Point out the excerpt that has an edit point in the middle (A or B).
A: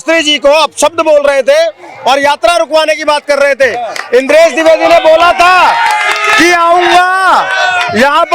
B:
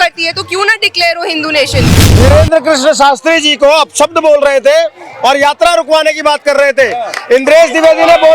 B